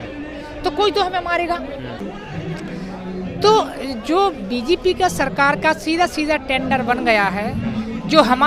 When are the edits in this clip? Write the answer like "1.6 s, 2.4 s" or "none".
none